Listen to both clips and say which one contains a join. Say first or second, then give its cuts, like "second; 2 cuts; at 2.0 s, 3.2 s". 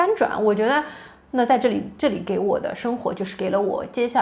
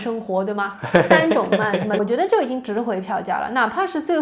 second; 1 cut; at 2.0 s